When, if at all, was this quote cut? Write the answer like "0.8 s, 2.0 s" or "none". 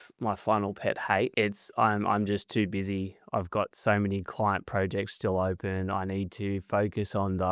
1.3 s